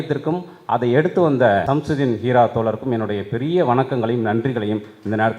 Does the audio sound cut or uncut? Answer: cut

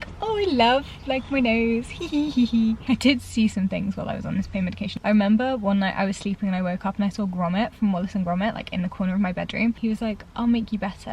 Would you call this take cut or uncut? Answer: cut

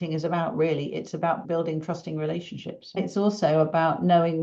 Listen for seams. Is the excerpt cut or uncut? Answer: cut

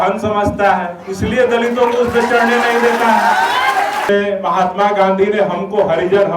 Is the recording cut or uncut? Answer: cut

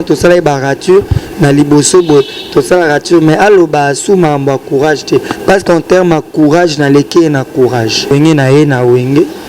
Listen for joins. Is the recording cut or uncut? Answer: cut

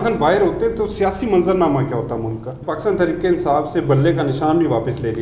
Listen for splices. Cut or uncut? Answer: cut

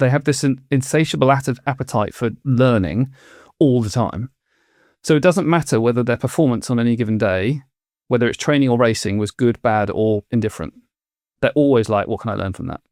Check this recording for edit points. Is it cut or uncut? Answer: uncut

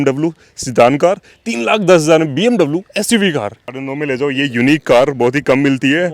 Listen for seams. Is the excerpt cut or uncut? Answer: cut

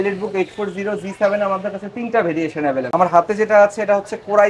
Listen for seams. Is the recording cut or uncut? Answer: uncut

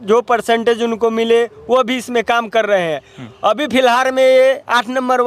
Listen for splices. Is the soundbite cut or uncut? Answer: uncut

